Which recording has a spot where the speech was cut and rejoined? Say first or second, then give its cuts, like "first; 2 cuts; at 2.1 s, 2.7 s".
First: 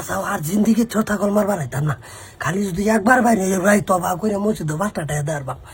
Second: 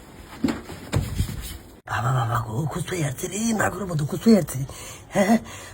second; 1 cut; at 1.8 s